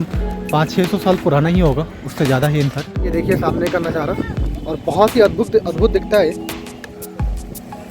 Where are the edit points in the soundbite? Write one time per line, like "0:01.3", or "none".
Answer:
0:03.1